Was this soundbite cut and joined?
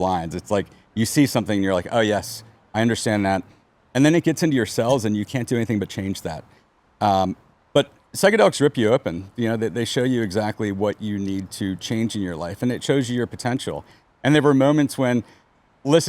no; 0 cuts

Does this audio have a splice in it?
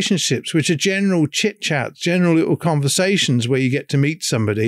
no; 0 cuts

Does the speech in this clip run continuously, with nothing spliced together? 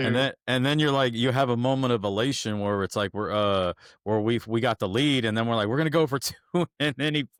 yes; 0 cuts

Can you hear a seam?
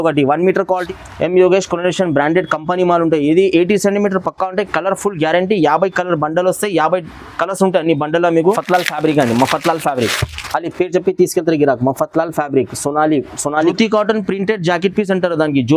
yes; 3 cuts; at 0.8 s, 8.6 s, 13.7 s

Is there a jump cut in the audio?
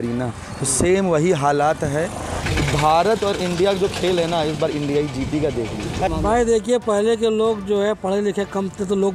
yes; 2 cuts; at 2.4 s, 6.1 s

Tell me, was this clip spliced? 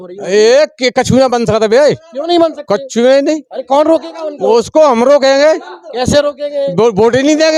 no; 0 cuts

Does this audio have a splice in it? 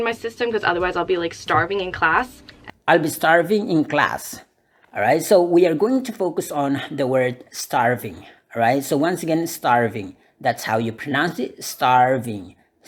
no; 0 cuts

